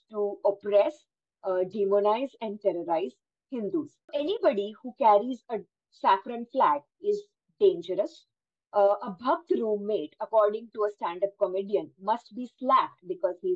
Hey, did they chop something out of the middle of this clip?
yes; 1 cut; at 4.1 s

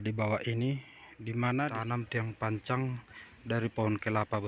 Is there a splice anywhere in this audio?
yes; 1 cut; at 1.7 s

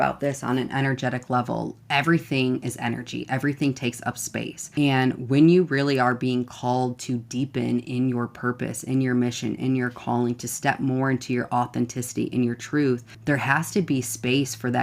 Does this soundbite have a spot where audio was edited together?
yes; 2 cuts; at 4.6 s, 13.1 s

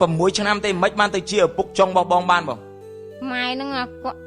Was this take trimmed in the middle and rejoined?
no; 0 cuts

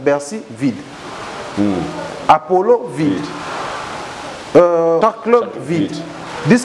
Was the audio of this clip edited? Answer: yes; 1 cut; at 5.0 s

